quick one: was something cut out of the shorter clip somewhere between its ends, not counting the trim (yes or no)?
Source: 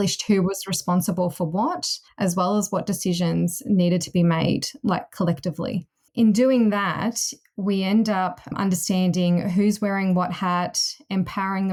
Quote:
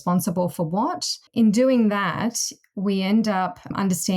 yes